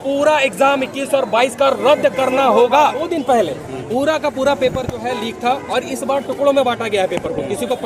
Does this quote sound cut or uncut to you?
cut